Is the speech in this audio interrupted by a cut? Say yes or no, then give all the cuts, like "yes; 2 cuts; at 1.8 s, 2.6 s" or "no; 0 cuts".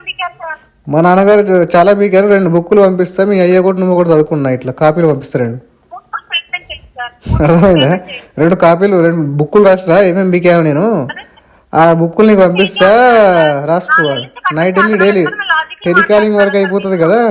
no; 0 cuts